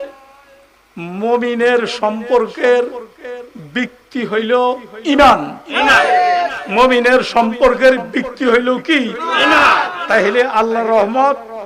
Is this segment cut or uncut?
uncut